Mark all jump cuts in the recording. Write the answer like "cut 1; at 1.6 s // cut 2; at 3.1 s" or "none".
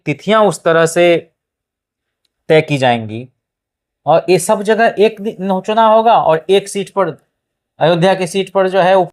none

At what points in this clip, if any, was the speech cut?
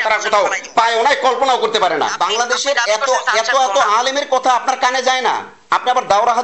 cut 1; at 2.1 s

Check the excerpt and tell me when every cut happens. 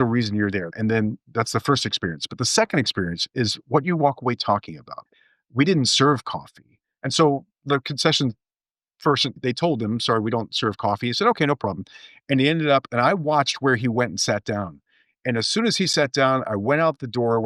cut 1; at 4.9 s

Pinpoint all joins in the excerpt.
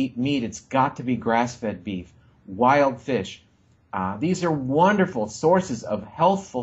none

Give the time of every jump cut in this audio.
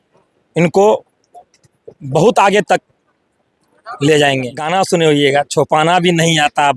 cut 1; at 4.6 s

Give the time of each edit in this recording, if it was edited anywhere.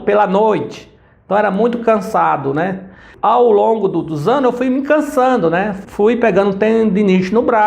cut 1; at 3.1 s

